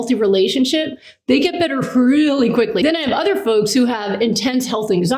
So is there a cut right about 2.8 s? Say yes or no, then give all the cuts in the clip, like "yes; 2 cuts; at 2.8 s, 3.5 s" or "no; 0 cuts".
yes; 1 cut; at 2.8 s